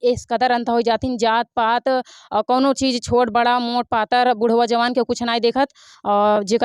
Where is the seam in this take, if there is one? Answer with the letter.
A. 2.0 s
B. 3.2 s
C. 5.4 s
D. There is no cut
D